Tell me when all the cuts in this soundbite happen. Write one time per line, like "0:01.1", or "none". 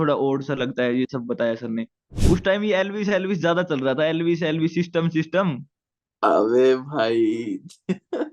0:02.1